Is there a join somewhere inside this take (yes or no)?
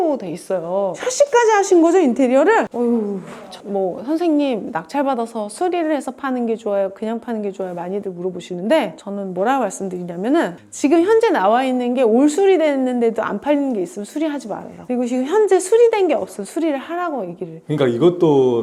no